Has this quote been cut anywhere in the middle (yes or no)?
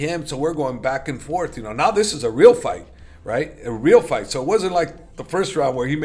no